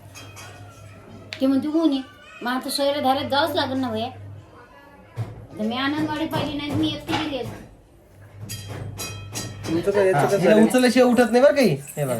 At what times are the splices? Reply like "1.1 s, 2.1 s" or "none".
10.4 s